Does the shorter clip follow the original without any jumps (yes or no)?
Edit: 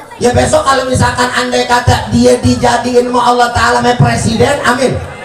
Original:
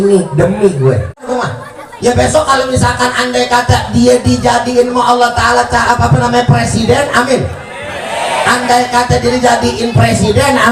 no